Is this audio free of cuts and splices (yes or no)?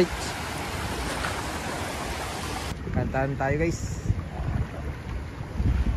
no